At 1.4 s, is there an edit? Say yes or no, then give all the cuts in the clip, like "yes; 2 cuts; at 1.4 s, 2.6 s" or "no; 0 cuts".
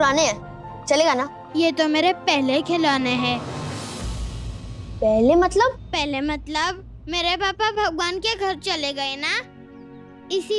yes; 1 cut; at 1.4 s